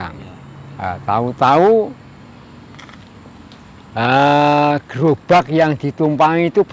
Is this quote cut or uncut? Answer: uncut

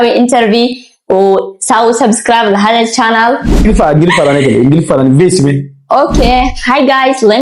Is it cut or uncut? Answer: cut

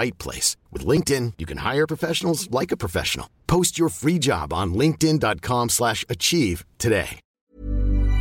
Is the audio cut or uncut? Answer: cut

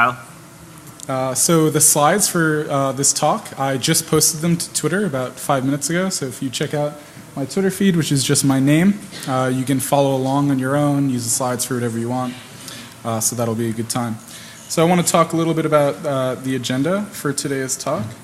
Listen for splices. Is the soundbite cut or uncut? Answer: uncut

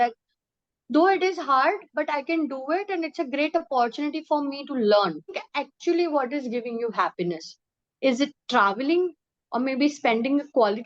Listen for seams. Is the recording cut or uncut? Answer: cut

